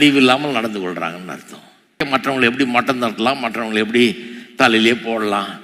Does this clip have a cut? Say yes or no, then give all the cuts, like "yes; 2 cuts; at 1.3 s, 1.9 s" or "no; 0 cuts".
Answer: yes; 1 cut; at 2.1 s